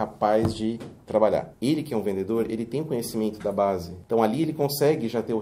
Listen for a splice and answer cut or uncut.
cut